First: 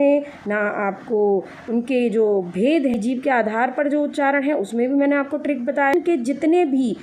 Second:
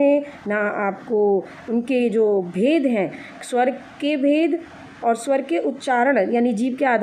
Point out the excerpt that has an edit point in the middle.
first; 2 cuts; at 3.0 s, 5.9 s

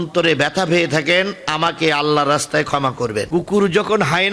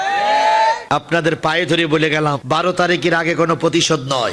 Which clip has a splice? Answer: first; 1 cut; at 3.3 s

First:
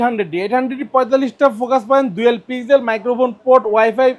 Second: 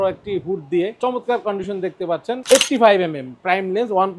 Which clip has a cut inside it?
second; 2 cuts; at 1.0 s, 2.4 s

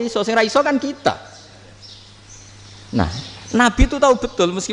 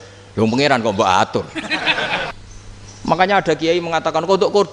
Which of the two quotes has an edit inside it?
second; 1 cut; at 2.3 s

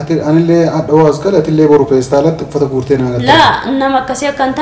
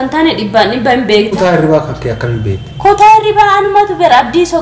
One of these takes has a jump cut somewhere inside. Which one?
second; 1 cut; at 1.3 s

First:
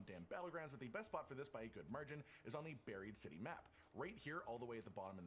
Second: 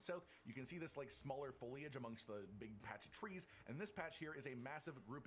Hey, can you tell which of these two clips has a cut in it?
first; 2 cuts; at 1.1 s, 3.5 s

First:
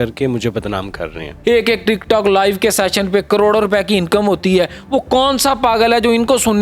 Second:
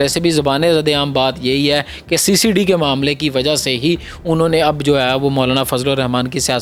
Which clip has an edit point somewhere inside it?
first; 1 cut; at 1.3 s

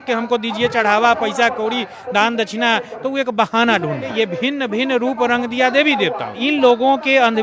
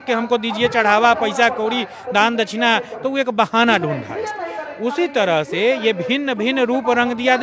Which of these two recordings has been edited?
first; 2 cuts; at 4.1 s, 6.4 s

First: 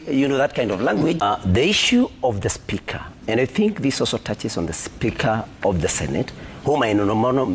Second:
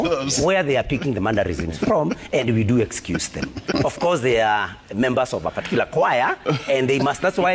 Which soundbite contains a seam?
first; 1 cut; at 1.2 s

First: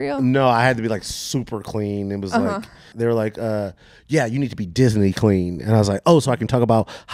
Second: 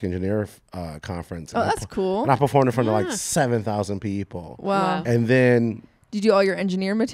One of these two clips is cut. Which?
first; 1 cut; at 2.9 s

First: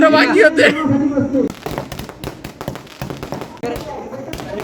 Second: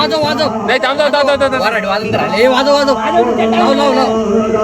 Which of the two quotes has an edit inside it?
first; 2 cuts; at 1.6 s, 3.6 s

